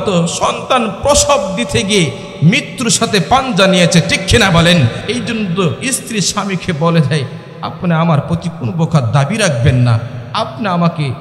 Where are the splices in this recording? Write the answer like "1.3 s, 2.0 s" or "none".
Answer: 5.0 s